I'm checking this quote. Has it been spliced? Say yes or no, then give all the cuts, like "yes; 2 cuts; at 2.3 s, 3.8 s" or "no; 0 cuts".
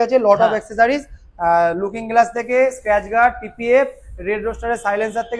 no; 0 cuts